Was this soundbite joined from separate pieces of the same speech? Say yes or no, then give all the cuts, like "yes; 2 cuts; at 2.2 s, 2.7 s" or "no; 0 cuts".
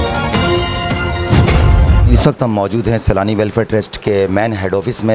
yes; 1 cut; at 2.1 s